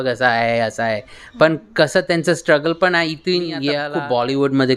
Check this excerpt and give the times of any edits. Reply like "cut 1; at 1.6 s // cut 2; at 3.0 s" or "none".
cut 1; at 3.8 s